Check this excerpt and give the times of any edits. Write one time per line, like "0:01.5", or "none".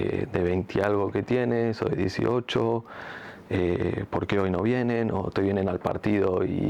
none